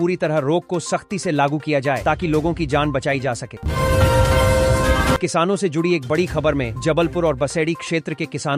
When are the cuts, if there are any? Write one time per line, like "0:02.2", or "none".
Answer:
0:03.6
0:05.2

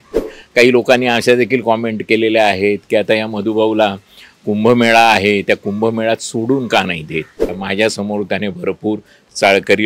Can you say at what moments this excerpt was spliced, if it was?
0:07.6

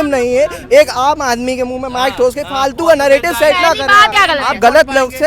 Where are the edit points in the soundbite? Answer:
0:04.1

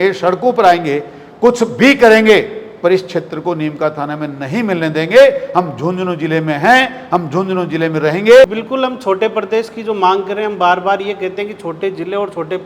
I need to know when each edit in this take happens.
0:08.5

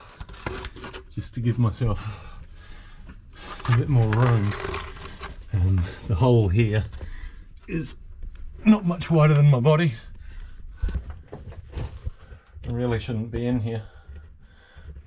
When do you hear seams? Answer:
0:11.0

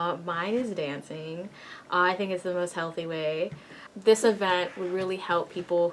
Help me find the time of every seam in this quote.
0:03.8

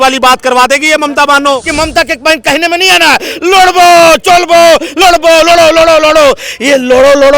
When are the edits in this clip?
0:01.7

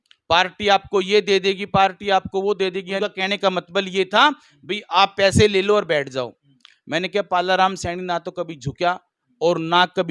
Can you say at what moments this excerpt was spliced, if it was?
0:02.9

